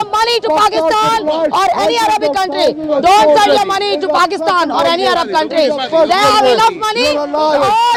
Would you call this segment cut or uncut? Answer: uncut